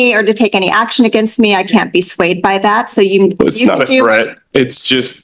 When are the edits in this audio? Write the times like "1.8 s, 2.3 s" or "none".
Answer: none

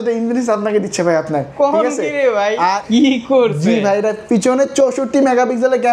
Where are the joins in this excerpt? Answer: 2.8 s

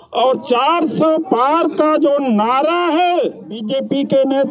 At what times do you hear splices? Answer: 3.6 s

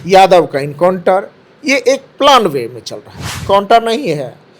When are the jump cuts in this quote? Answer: 3.4 s

